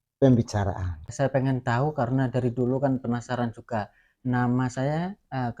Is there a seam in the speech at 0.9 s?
yes; 1 cut; at 0.9 s

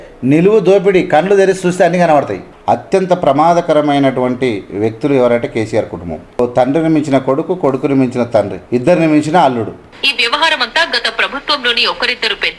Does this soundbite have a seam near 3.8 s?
no; 4 cuts; at 2.4 s, 6.4 s, 8.6 s, 9.8 s

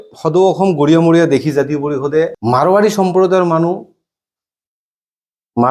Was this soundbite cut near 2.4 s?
yes; 1 cut; at 2.4 s

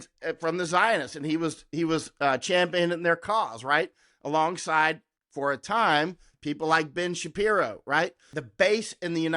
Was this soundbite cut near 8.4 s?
yes; 1 cut; at 8.4 s

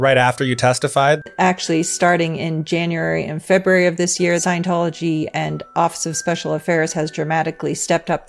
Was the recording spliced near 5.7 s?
no; 2 cuts; at 1.3 s, 4.4 s

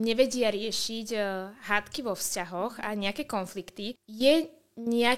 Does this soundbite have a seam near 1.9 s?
no; 1 cut; at 4.0 s

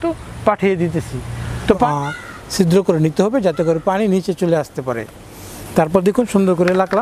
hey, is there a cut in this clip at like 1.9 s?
yes; 1 cut; at 1.9 s

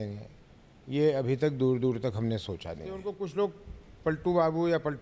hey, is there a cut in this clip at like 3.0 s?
yes; 1 cut; at 3.0 s

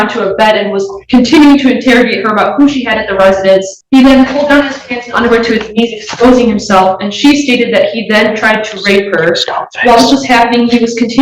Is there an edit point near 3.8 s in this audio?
yes; 1 cut; at 3.8 s

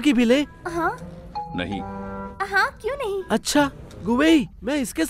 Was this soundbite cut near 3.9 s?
yes; 1 cut; at 3.9 s

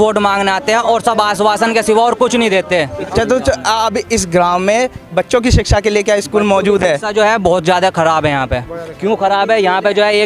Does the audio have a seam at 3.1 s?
yes; 1 cut; at 3.1 s

